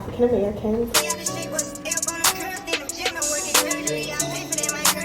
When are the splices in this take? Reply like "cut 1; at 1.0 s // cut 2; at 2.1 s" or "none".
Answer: cut 1; at 0.9 s